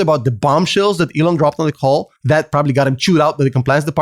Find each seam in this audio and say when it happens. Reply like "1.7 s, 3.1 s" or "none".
2.1 s